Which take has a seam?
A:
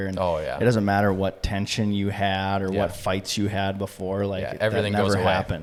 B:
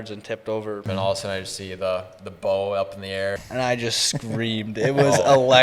B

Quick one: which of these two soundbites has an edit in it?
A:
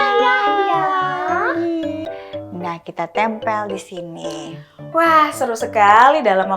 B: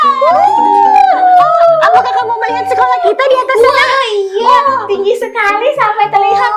A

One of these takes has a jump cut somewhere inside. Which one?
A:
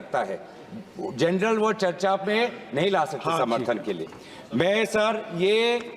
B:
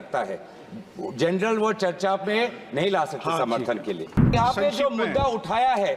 B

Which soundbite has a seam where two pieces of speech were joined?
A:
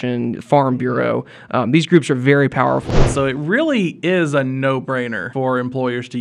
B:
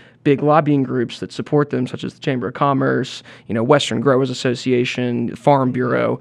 A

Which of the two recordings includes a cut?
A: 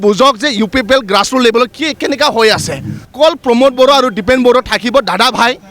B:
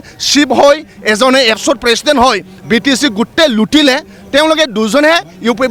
A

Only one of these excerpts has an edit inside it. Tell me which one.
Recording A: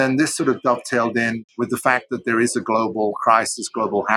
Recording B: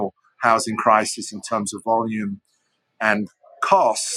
A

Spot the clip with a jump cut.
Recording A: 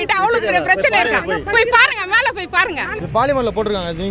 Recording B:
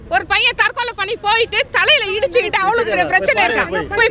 A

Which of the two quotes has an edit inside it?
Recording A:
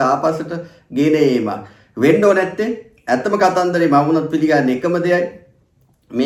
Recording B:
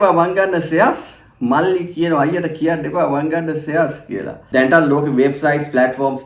B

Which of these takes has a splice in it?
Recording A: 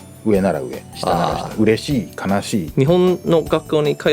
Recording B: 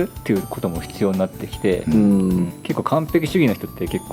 A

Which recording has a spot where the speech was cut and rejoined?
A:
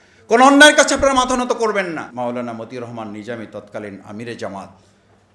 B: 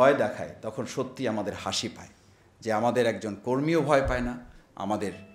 A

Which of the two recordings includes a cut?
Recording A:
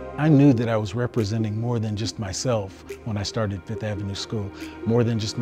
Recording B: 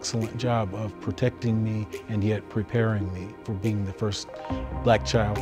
B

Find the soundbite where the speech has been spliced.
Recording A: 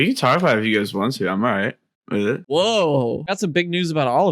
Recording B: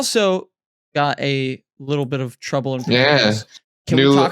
A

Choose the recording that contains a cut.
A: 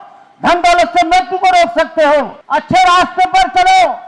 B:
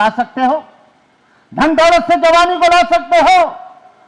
A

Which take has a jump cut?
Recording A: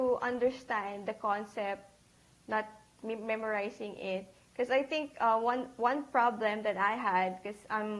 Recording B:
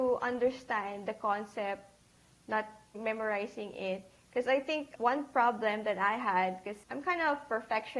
B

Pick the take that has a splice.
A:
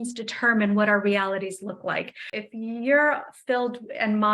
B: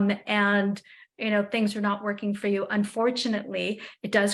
A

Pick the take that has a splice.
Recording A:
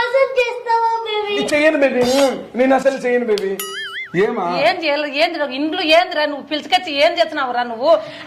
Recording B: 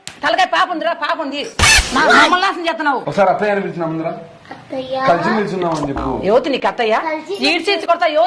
B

